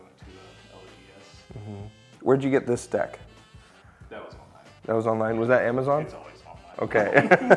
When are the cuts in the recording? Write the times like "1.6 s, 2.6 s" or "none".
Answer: none